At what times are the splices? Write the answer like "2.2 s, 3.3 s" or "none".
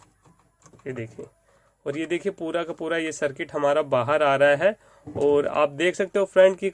none